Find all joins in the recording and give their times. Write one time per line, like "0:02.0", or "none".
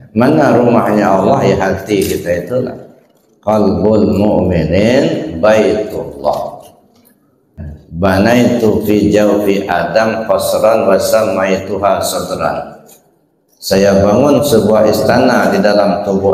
0:07.8